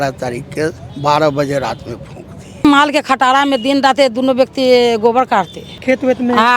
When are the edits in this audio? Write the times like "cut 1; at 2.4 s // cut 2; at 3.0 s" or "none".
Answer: cut 1; at 0.9 s // cut 2; at 2.6 s // cut 3; at 5.6 s